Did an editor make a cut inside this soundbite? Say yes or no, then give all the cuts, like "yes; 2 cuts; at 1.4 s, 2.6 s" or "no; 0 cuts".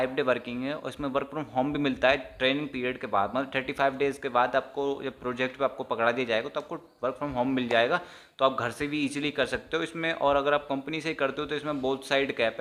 no; 0 cuts